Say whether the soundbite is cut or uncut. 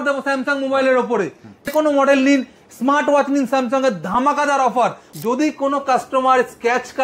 cut